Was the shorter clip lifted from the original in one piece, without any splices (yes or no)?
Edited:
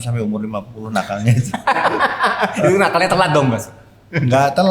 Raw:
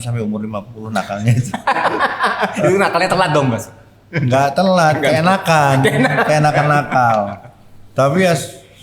yes